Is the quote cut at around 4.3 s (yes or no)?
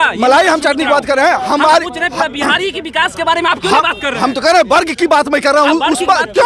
no